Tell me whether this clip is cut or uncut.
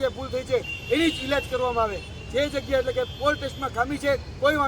uncut